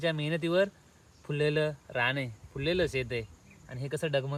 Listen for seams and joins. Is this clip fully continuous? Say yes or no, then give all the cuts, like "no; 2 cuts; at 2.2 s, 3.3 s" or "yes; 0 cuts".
yes; 0 cuts